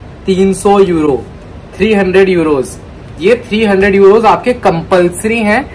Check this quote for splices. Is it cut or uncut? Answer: uncut